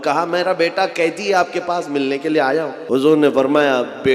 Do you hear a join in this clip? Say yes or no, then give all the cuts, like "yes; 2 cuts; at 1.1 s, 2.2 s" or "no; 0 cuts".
yes; 1 cut; at 2.8 s